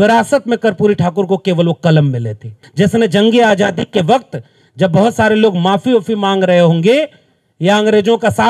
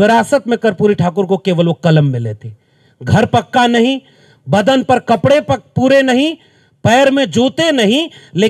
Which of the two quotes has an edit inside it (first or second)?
first